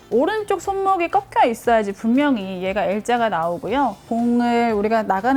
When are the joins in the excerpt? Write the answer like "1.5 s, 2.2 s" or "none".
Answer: 4.0 s